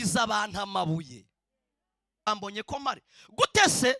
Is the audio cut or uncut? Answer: cut